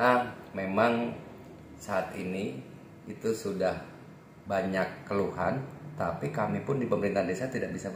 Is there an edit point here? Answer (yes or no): no